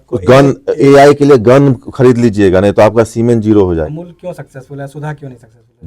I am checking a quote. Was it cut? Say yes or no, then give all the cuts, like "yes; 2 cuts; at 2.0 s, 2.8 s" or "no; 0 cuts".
yes; 1 cut; at 3.9 s